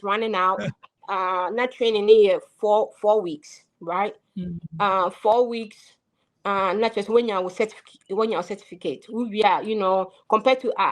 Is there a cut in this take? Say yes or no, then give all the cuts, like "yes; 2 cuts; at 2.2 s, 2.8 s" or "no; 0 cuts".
yes; 1 cut; at 0.9 s